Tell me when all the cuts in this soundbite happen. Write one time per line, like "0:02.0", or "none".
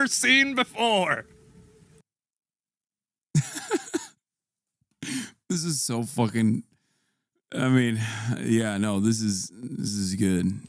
none